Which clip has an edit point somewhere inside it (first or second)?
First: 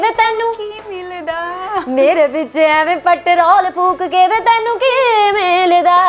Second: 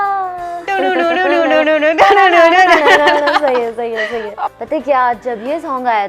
second